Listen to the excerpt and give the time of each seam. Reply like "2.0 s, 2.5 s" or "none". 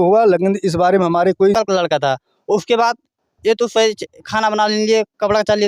1.6 s

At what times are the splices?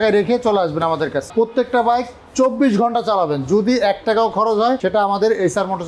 1.3 s, 4.8 s

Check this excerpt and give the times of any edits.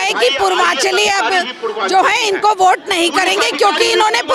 none

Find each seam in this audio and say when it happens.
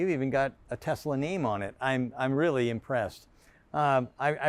none

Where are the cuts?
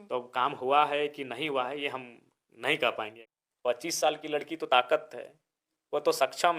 3.2 s

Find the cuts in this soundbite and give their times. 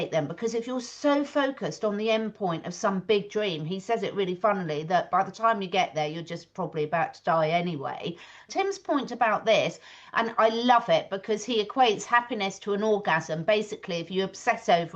8.4 s

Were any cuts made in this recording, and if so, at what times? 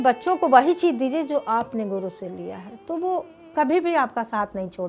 3.4 s

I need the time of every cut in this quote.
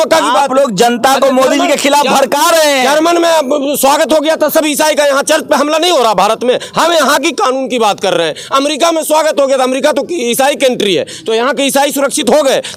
none

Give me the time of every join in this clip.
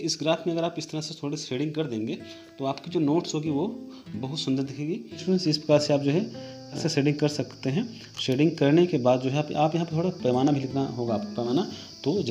5.2 s, 6.8 s, 11.5 s

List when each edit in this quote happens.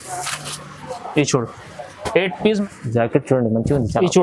2.6 s

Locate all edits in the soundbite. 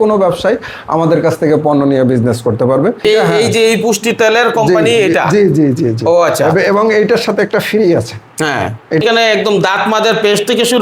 3.0 s, 9.0 s

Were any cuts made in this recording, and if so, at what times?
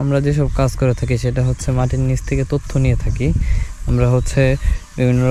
none

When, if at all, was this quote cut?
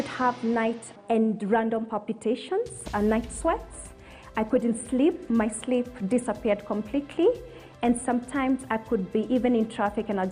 0.9 s

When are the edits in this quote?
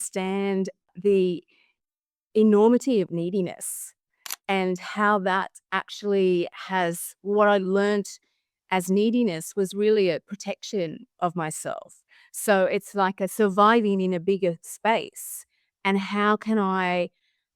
0.9 s

